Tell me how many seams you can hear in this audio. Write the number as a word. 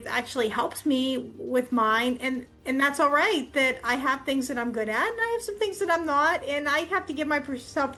zero